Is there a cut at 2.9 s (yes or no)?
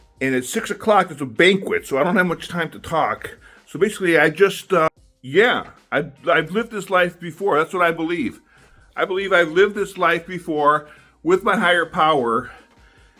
no